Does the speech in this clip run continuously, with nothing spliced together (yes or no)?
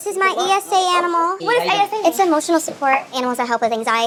yes